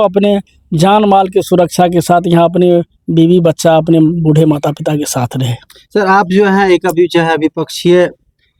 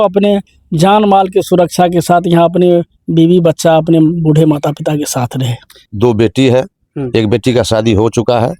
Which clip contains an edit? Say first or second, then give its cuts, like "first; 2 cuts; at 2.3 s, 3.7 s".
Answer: second; 1 cut; at 5.8 s